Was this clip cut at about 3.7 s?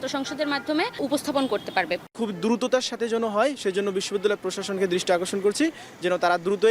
no; 2 cuts; at 1.0 s, 2.1 s

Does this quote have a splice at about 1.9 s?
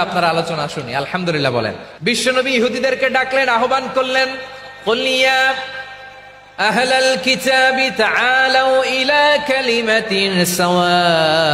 yes; 1 cut; at 1.9 s

